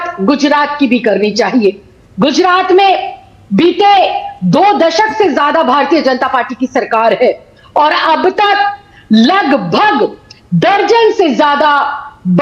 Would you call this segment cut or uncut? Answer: uncut